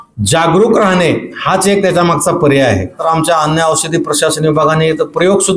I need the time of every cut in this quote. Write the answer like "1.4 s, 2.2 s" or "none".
3.0 s